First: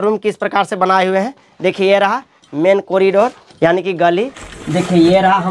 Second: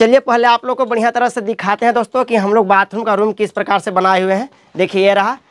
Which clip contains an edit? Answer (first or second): first